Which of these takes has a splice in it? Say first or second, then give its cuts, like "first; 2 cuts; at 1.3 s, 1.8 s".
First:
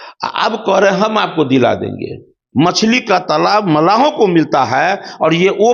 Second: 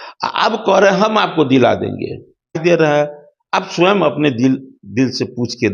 first; 1 cut; at 2.3 s